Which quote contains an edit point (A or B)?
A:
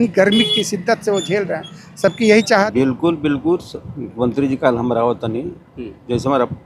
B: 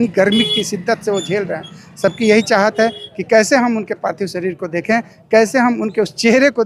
A